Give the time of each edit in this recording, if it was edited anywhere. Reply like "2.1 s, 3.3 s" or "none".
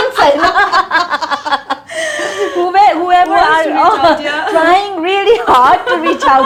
none